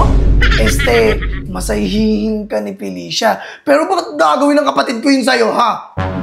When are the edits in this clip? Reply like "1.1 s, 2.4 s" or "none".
none